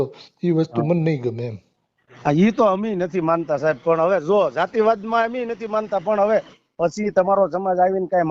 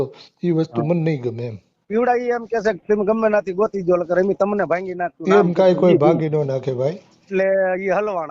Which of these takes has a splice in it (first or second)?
second